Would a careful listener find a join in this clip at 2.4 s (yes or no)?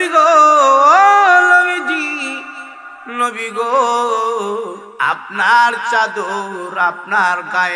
no